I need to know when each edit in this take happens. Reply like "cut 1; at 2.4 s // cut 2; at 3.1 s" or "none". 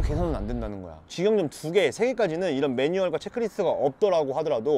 none